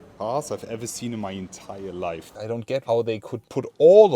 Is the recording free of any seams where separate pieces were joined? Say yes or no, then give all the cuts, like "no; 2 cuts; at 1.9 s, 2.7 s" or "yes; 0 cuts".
no; 1 cut; at 2.3 s